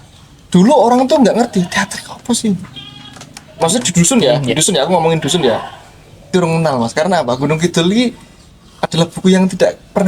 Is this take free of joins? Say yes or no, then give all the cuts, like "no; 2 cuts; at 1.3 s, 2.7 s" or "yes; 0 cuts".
no; 1 cut; at 6.3 s